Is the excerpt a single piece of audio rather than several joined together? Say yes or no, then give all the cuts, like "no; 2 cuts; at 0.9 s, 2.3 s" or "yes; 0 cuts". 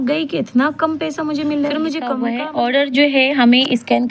no; 1 cut; at 2.2 s